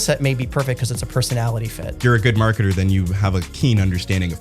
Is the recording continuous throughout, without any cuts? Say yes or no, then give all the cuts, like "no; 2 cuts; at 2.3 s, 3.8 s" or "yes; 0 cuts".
no; 2 cuts; at 1.8 s, 3.5 s